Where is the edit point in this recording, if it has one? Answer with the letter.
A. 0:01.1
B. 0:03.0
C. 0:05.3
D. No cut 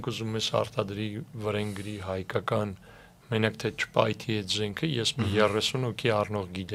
D